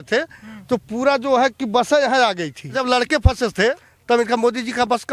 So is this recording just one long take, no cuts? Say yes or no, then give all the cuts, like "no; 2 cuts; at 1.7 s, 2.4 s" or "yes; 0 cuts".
no; 2 cuts; at 2.8 s, 3.9 s